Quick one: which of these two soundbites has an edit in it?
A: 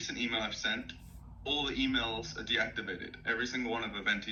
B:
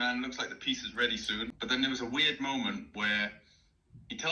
B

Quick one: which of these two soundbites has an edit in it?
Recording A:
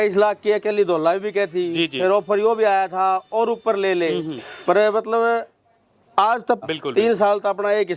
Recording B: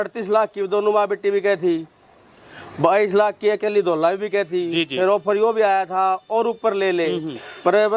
A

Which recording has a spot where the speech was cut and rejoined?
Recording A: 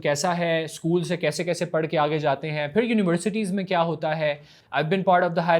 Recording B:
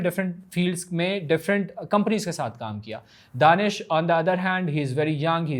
A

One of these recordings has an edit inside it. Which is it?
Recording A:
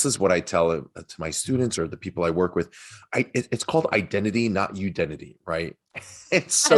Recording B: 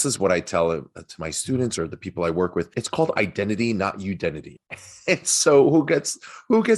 B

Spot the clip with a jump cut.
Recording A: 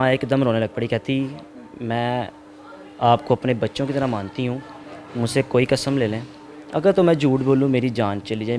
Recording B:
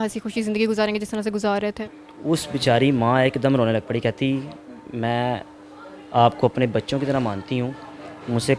B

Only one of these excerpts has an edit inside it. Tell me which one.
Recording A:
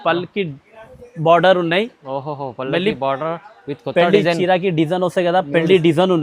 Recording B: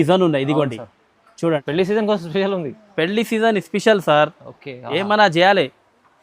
B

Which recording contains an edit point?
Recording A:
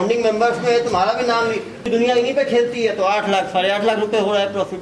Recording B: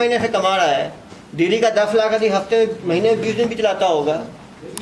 A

